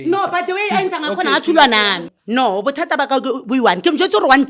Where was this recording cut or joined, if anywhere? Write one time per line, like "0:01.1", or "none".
0:02.1